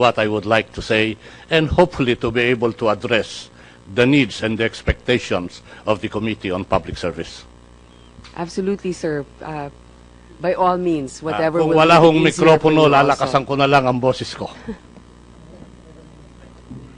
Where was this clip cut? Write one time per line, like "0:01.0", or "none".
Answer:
0:10.9